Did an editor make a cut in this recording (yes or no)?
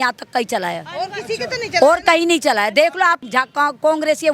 yes